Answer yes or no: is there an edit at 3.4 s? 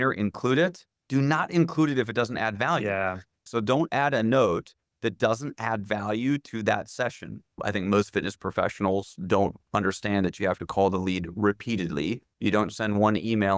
yes